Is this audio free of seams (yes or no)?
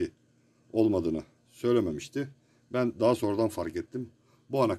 yes